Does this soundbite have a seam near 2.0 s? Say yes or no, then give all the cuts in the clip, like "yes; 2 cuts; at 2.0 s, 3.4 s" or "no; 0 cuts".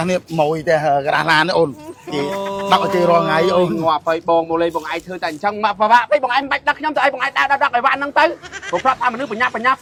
no; 0 cuts